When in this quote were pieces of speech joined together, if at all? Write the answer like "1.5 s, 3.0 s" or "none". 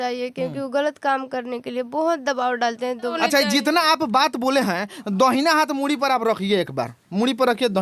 3.1 s